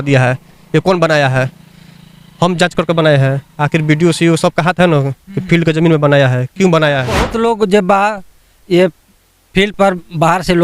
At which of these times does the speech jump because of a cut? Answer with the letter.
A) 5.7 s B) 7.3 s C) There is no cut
B